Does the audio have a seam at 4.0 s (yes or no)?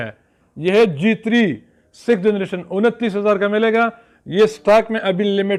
no